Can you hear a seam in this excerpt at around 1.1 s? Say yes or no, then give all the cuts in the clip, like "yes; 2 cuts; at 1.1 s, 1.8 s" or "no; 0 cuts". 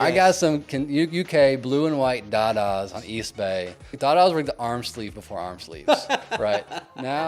no; 1 cut; at 3.9 s